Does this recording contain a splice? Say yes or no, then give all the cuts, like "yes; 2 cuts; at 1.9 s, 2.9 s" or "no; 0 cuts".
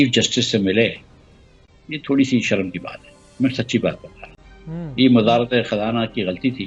no; 0 cuts